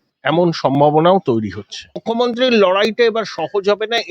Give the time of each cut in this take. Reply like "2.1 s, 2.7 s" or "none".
2.0 s